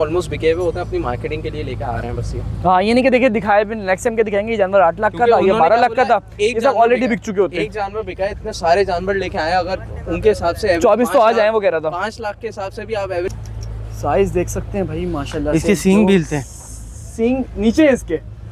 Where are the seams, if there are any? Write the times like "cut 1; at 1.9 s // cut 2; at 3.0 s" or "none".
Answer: cut 1; at 13.3 s